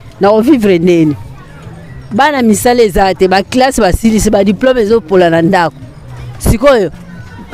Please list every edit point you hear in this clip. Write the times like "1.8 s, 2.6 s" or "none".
none